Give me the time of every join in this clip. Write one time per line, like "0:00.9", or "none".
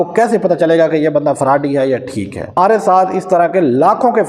0:02.5